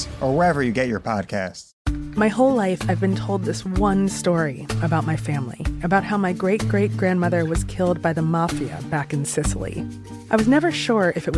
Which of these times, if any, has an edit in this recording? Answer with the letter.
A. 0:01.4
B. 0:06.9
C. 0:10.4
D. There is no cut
A